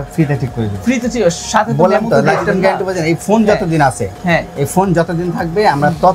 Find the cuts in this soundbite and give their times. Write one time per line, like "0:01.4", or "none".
none